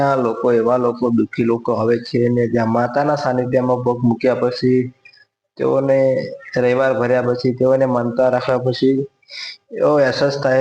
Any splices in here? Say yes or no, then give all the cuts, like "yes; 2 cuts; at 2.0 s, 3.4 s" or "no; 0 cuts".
no; 0 cuts